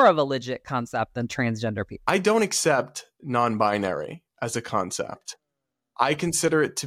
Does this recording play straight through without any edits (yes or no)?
no